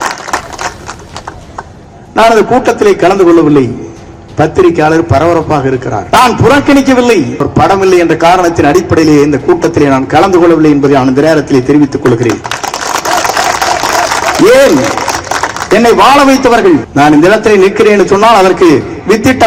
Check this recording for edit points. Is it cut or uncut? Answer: cut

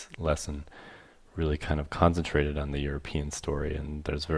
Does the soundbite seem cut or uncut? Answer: cut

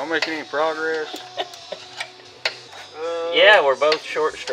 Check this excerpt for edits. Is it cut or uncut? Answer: cut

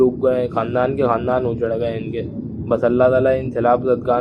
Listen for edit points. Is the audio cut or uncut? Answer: uncut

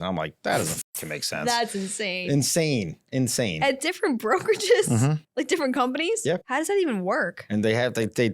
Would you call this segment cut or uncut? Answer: cut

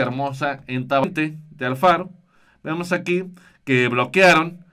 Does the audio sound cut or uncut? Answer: cut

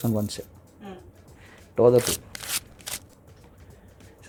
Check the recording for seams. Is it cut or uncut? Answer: uncut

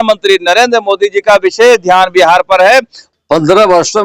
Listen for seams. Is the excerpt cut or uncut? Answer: cut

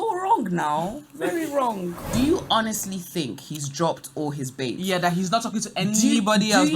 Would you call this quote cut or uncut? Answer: cut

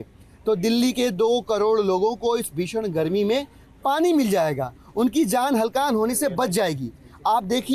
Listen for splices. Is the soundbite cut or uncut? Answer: uncut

